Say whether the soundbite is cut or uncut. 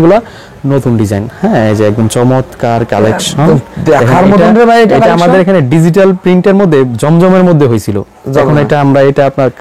uncut